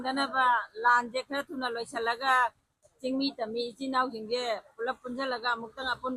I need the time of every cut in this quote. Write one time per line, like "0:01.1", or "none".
none